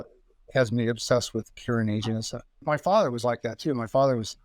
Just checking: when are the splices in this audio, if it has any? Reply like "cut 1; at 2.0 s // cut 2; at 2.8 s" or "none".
cut 1; at 2.6 s